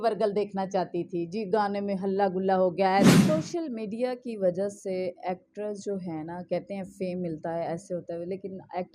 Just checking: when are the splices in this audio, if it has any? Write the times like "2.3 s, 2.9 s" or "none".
3.1 s